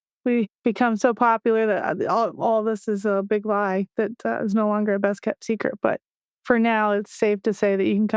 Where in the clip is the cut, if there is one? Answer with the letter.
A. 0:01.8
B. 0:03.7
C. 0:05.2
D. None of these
D